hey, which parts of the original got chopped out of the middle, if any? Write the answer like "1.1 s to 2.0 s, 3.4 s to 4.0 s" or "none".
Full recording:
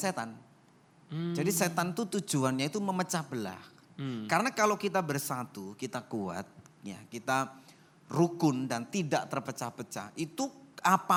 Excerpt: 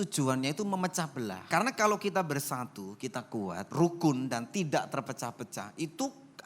3.6 s to 4.2 s, 6.4 s to 8.0 s

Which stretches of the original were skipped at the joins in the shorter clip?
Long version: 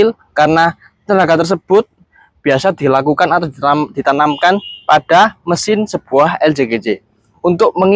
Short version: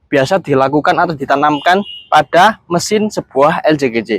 3.5 s to 3.9 s

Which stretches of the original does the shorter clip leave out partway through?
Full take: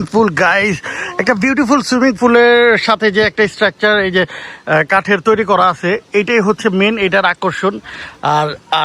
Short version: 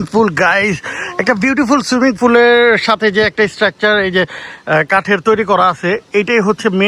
none

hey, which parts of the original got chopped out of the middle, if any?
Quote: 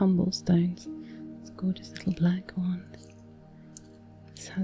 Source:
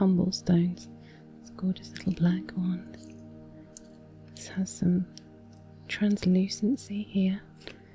none

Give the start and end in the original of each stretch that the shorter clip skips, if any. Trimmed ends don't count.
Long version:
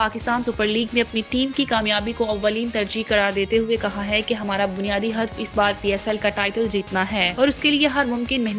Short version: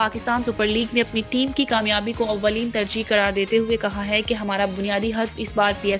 none

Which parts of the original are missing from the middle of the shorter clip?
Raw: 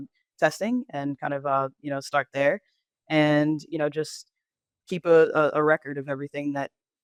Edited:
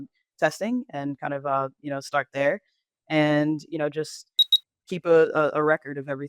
none

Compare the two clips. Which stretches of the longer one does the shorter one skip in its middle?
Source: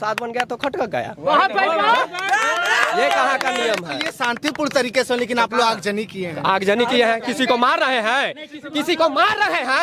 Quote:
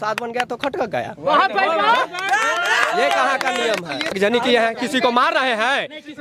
4.1 s to 6.6 s

